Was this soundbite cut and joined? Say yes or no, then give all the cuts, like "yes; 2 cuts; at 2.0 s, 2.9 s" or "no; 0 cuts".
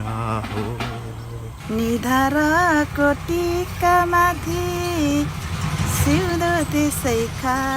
yes; 1 cut; at 1.5 s